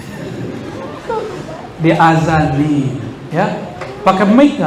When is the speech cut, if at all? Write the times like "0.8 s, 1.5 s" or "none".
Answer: 1.6 s